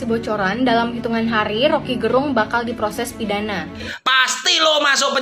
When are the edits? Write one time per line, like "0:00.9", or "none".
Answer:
0:03.9